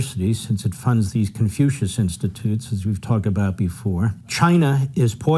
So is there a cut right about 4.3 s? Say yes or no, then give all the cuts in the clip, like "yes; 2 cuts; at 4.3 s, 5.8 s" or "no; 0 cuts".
yes; 1 cut; at 4.3 s